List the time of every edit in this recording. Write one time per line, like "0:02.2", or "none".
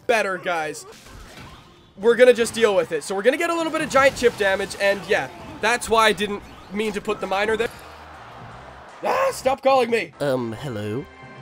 0:01.1
0:07.6

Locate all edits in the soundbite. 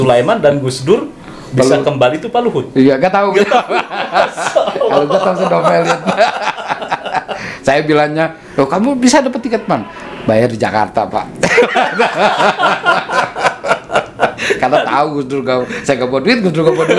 none

